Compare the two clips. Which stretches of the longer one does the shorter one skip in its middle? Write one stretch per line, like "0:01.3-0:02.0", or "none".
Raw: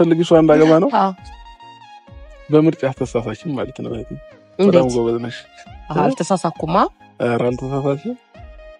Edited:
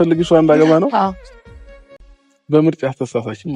none